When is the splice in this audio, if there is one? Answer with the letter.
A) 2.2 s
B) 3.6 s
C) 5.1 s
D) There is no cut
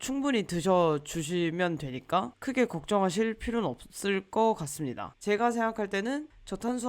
C